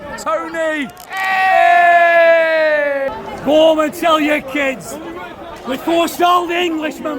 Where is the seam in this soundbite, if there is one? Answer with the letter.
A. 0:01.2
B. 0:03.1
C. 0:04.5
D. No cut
B